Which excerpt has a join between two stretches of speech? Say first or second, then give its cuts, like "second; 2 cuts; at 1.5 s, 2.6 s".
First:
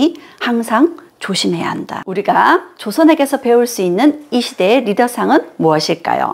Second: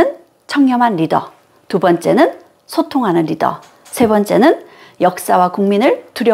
first; 1 cut; at 2.1 s